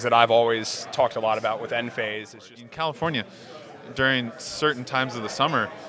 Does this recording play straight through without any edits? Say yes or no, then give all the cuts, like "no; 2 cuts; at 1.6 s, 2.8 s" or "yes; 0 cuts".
no; 1 cut; at 2.5 s